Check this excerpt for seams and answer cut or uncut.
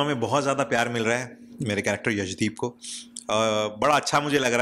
uncut